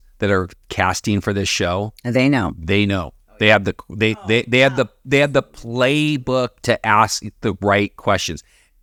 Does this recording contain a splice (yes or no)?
no